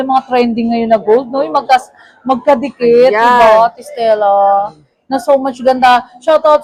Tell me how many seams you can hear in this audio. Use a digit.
0